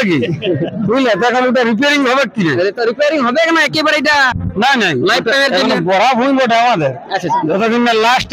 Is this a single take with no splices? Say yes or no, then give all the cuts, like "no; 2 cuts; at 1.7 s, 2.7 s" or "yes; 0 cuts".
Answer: yes; 0 cuts